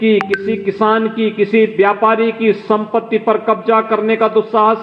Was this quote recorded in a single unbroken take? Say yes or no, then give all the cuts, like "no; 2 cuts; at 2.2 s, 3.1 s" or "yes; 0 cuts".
yes; 0 cuts